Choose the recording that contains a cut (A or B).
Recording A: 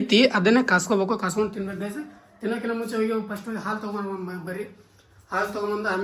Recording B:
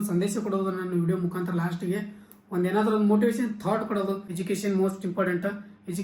B